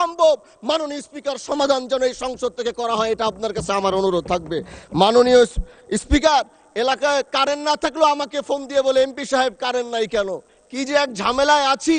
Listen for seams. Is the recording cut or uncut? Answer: uncut